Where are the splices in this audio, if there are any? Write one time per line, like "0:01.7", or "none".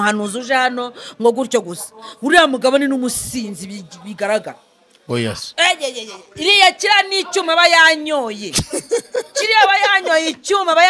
none